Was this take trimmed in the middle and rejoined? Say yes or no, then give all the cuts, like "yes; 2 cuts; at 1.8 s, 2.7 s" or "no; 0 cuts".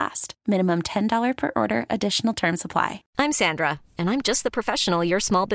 yes; 1 cut; at 3.0 s